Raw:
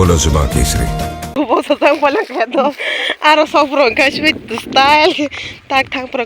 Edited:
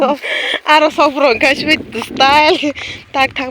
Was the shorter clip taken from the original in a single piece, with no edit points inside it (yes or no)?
yes